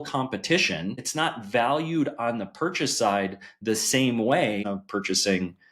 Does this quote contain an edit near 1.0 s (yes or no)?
yes